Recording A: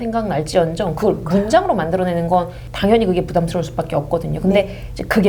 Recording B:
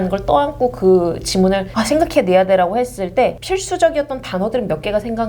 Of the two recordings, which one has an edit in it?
B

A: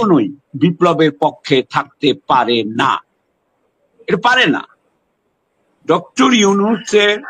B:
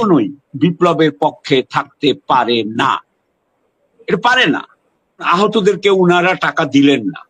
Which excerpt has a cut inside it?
B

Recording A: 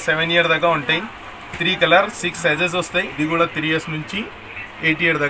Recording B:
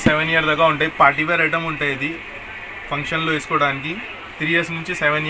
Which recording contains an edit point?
A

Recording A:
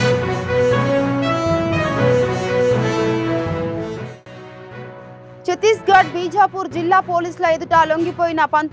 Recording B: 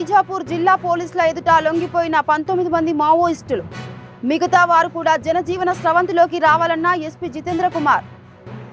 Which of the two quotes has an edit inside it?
A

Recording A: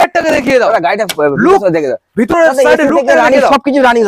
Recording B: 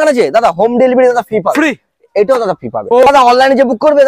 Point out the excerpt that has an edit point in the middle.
B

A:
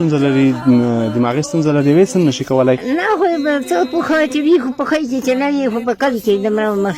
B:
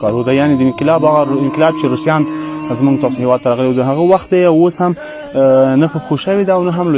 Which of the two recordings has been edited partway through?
A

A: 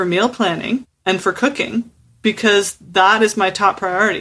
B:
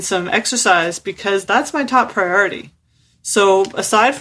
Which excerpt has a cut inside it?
A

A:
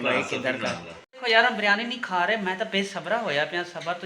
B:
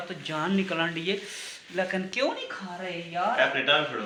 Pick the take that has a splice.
A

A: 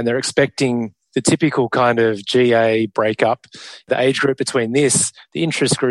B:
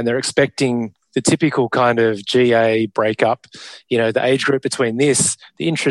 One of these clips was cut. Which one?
A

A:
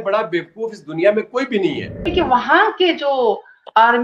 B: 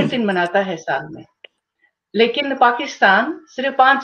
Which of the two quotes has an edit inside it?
A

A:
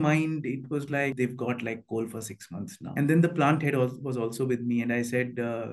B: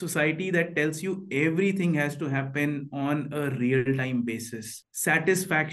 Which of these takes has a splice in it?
A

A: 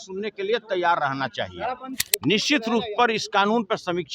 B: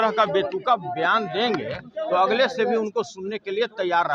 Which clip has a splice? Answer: A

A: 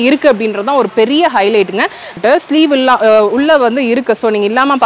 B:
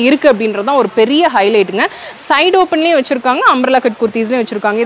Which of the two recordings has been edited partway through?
A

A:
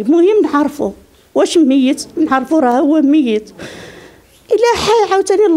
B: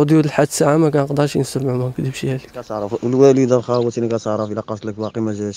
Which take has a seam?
B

